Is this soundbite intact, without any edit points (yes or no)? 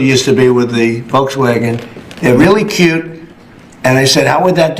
no